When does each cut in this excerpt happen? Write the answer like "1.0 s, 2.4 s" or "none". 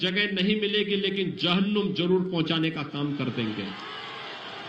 none